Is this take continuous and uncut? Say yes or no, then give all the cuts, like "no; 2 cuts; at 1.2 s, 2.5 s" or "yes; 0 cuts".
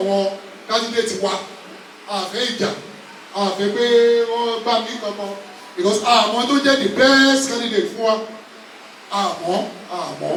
yes; 0 cuts